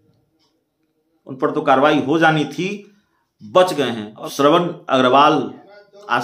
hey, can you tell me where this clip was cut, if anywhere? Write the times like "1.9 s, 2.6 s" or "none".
4.3 s